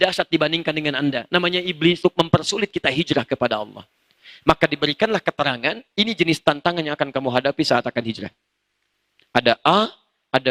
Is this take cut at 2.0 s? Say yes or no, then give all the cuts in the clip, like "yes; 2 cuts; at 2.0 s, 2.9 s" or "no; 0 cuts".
yes; 1 cut; at 2.0 s